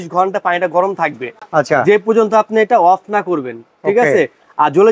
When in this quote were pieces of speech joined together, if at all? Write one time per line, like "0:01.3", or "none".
none